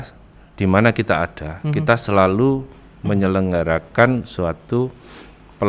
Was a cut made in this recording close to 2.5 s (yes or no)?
no